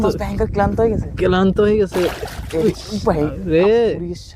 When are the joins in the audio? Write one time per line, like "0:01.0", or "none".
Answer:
none